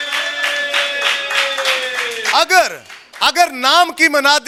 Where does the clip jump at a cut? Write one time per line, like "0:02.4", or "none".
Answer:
none

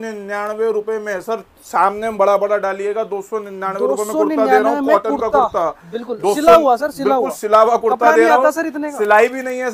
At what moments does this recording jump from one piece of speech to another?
none

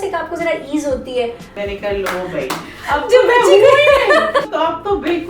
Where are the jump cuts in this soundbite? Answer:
0:01.5
0:04.5

